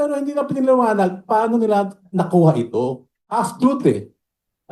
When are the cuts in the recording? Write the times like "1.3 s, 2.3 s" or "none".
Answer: 3.4 s